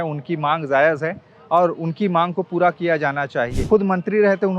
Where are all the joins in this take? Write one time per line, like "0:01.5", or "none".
0:03.7